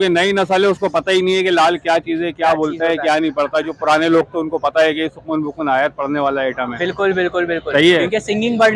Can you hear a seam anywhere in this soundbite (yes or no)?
no